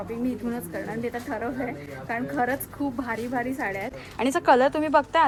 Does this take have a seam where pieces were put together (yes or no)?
no